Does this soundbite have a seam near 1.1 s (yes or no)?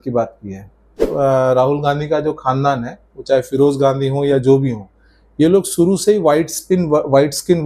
yes